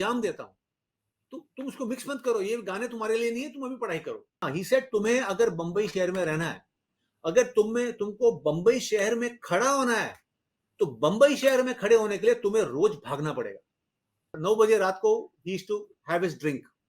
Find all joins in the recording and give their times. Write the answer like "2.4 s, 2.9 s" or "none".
4.4 s, 14.4 s